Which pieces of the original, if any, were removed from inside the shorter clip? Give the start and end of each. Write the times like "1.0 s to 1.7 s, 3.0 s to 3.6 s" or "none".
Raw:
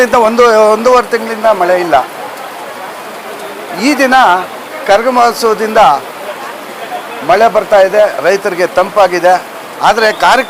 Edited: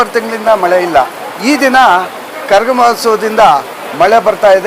2.2 s to 3.6 s, 6.2 s to 7.1 s